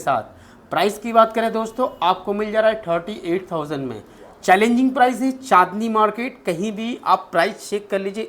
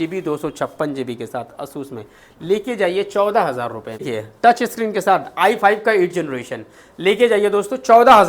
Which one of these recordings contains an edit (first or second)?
second